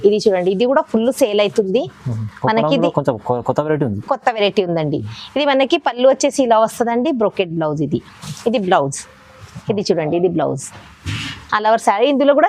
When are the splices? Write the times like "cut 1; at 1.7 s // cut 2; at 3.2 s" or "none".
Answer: none